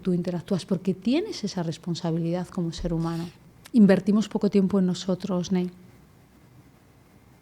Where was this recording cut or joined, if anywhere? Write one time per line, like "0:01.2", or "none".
0:03.3